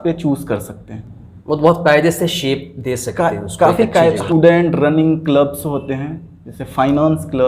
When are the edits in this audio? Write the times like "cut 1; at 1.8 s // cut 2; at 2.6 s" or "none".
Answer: none